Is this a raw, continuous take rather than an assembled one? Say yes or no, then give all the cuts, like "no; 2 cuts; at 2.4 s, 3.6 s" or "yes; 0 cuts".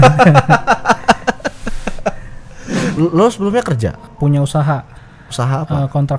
no; 2 cuts; at 2.9 s, 4.1 s